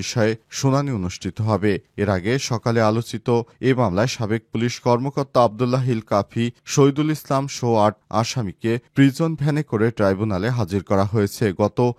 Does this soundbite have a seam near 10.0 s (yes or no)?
no